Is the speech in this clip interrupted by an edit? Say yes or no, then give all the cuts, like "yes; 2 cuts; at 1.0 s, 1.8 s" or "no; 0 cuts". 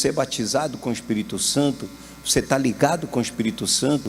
no; 0 cuts